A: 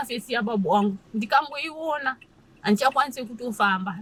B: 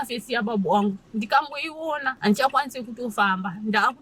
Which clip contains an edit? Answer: B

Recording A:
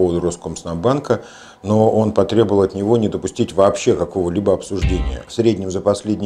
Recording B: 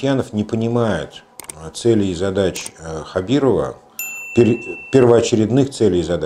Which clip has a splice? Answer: A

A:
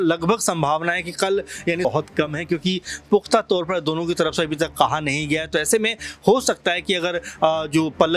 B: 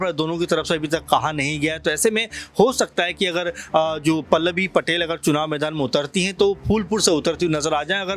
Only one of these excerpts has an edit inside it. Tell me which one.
A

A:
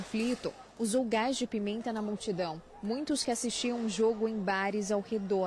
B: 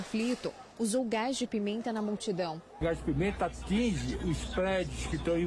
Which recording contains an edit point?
B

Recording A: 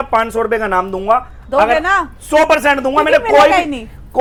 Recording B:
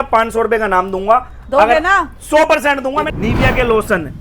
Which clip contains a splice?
B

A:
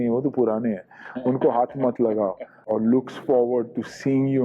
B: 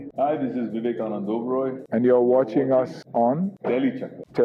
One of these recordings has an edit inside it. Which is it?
A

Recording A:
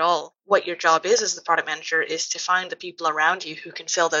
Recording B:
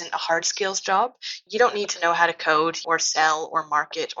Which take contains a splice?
B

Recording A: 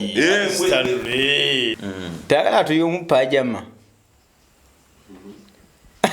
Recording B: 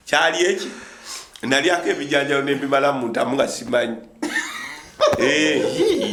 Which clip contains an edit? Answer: A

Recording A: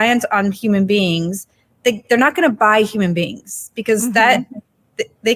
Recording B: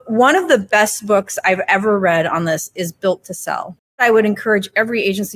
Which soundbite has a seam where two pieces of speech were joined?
B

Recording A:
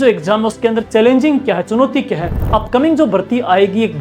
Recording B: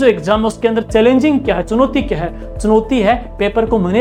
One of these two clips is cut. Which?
A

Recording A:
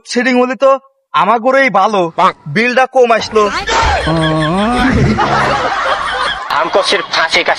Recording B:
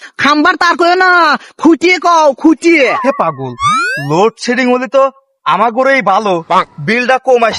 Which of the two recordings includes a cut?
B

